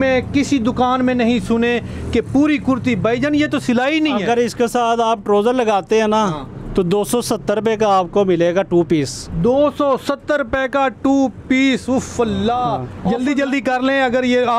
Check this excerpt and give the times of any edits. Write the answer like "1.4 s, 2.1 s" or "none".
12.9 s

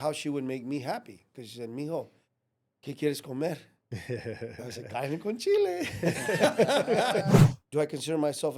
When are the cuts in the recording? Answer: 7.3 s

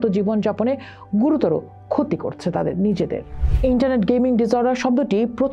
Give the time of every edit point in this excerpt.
none

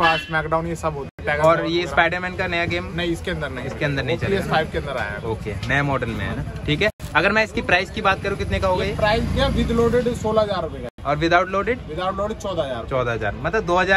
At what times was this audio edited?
none

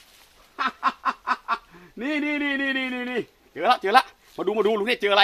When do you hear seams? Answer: 3.5 s

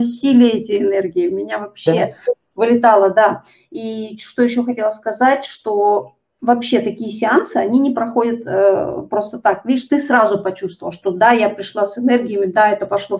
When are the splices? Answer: none

